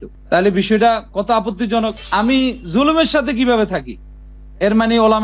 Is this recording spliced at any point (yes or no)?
yes